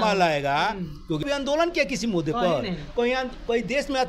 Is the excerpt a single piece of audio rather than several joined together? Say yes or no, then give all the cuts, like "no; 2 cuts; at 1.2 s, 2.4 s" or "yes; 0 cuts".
no; 1 cut; at 1.2 s